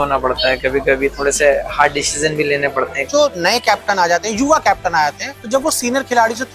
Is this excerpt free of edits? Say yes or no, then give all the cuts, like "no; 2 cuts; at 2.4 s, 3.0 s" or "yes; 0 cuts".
no; 2 cuts; at 3.0 s, 5.3 s